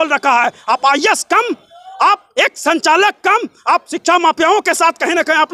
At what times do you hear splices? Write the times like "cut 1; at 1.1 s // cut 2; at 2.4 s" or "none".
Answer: none